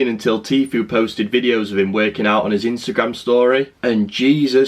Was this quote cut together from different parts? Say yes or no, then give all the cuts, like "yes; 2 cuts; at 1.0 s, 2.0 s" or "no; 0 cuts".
no; 0 cuts